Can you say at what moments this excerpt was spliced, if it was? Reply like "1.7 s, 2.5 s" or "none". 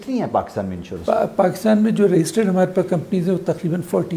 none